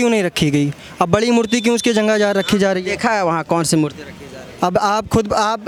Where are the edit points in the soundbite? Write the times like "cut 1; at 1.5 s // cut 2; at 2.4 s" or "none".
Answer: none